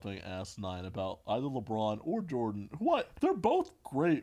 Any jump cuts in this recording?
yes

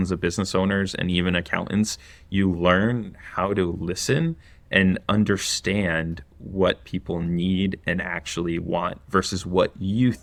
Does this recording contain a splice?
no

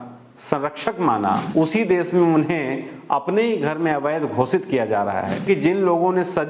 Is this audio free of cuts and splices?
no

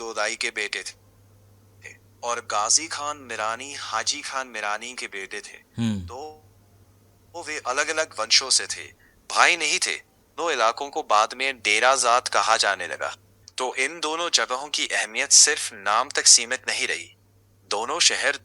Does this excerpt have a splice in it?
no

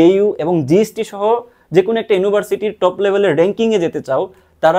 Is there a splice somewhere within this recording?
no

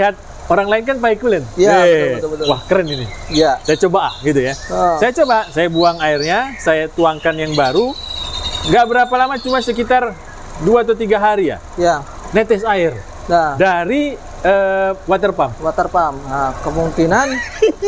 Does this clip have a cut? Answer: no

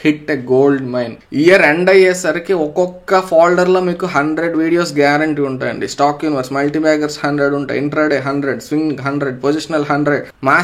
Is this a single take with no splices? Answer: no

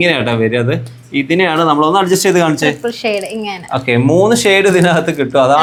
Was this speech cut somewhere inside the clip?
no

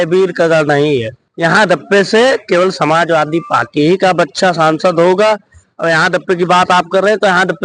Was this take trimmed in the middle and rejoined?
yes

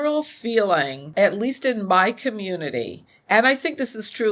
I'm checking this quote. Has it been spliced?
yes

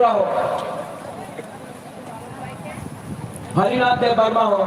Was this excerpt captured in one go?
no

